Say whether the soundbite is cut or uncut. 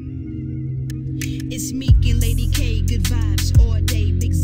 uncut